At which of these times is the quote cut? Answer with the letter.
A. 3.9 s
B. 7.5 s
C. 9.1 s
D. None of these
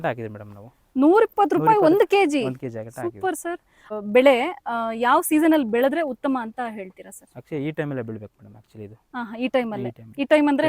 A